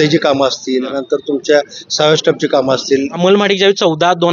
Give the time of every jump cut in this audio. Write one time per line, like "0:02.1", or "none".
0:00.9
0:03.1